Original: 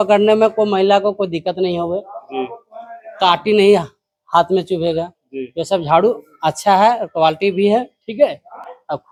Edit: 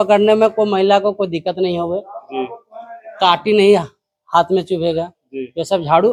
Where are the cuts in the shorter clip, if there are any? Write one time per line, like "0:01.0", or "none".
none